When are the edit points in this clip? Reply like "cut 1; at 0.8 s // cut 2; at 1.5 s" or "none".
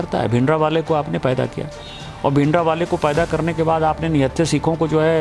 none